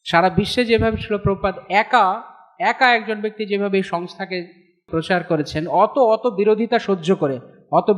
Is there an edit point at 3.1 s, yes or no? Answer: no